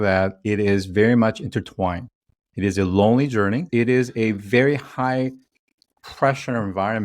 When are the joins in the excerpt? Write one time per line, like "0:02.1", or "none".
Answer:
0:03.7